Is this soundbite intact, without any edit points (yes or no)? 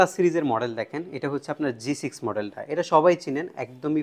yes